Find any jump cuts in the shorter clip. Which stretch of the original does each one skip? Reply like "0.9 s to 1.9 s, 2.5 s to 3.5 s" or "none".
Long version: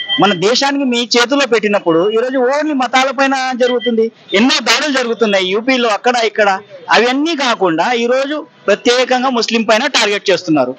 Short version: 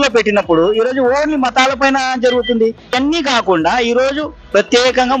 4.3 s to 7.1 s